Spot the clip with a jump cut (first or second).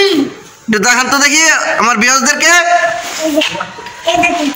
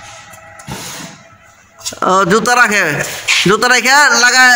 first